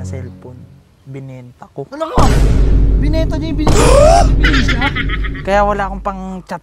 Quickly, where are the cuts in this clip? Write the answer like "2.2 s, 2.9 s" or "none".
none